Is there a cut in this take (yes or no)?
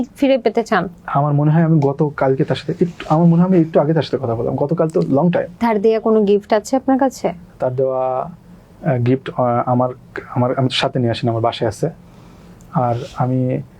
no